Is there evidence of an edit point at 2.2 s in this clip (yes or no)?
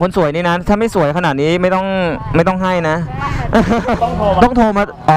no